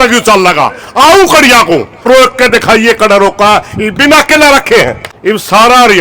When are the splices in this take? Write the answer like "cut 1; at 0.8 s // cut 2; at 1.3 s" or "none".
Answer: cut 1; at 2.1 s // cut 2; at 5.1 s

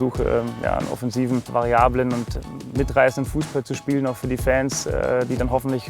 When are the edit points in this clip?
cut 1; at 1.5 s

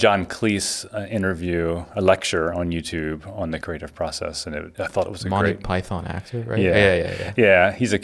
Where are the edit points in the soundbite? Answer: cut 1; at 3.6 s // cut 2; at 4.7 s

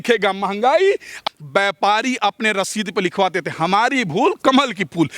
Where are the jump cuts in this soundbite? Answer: cut 1; at 1.2 s

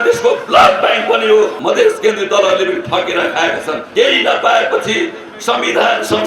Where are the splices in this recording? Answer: cut 1; at 1.6 s // cut 2; at 3.8 s

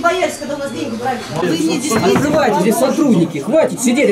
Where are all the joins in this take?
cut 1; at 1.4 s

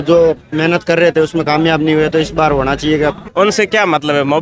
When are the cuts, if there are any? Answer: cut 1; at 3.2 s

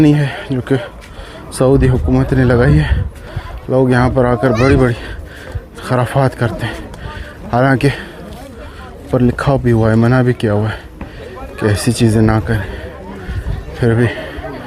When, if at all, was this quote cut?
none

